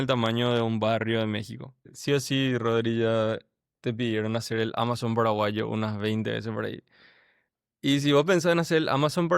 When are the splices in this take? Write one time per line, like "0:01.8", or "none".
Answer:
0:01.9